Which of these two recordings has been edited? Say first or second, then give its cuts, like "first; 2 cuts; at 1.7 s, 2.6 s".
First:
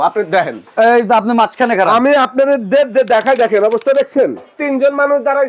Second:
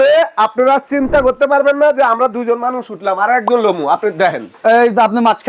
first; 1 cut; at 4.6 s